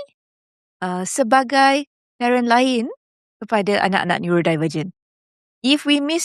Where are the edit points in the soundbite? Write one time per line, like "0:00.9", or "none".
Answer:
none